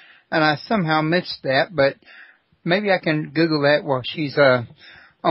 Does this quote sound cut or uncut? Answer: cut